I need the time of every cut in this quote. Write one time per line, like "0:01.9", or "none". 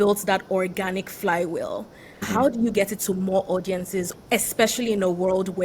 0:02.2
0:04.1